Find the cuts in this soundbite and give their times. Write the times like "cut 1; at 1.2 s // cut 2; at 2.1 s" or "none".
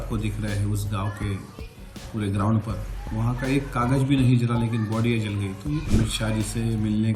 cut 1; at 5.8 s